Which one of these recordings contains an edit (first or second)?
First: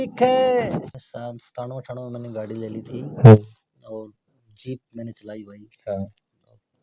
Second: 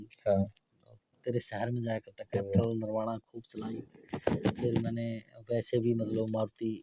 first